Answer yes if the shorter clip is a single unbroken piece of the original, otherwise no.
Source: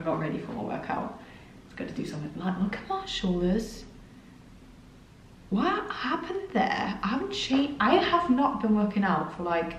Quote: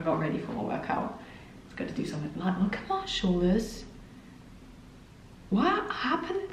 yes